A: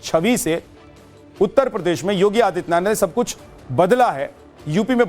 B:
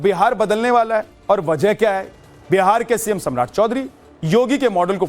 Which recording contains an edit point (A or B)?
A